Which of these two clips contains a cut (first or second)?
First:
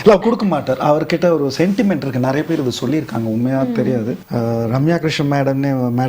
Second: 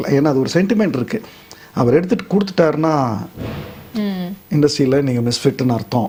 first